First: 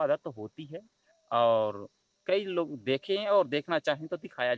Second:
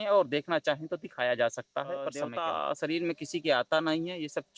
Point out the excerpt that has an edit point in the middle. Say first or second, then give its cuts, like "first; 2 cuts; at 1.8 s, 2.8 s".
second; 1 cut; at 2.3 s